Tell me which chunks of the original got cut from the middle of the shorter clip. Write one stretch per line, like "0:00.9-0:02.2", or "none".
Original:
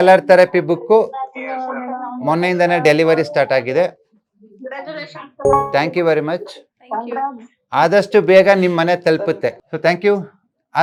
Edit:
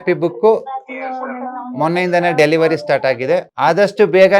0:04.0-0:07.6